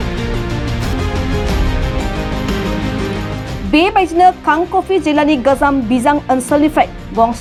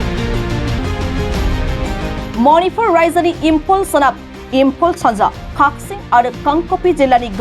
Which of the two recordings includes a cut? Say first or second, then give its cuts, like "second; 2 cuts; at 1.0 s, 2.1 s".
second; 2 cuts; at 0.8 s, 2.3 s